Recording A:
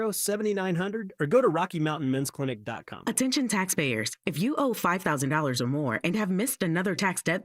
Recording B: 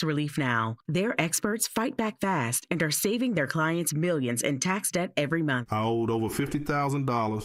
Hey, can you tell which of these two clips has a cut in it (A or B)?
A